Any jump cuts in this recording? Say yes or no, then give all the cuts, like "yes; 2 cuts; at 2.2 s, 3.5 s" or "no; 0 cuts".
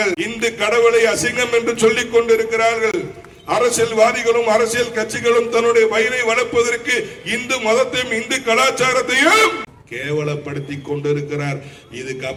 no; 0 cuts